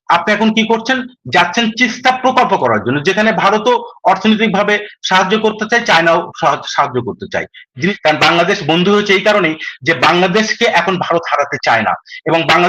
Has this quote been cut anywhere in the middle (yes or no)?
yes